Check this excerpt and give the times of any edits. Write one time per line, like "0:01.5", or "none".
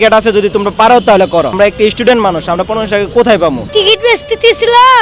0:01.5
0:03.6